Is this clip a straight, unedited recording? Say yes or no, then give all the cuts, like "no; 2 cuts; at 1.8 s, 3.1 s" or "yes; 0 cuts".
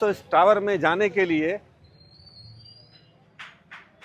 yes; 0 cuts